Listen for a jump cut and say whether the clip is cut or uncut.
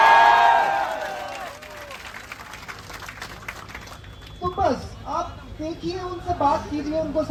uncut